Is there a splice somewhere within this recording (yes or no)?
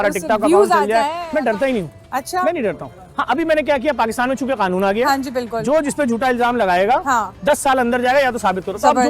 yes